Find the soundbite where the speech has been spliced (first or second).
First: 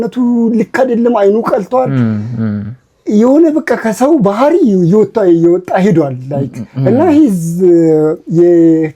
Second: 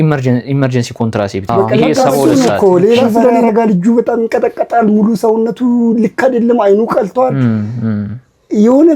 second